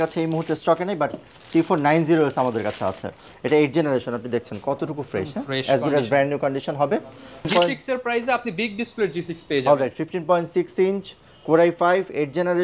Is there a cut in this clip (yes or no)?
yes